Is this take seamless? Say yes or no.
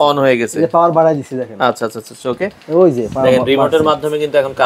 yes